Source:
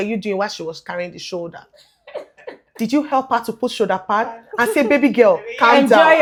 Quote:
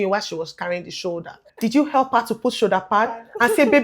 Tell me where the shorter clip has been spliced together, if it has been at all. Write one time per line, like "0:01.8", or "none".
0:01.4